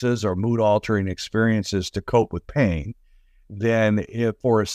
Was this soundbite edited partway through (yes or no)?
no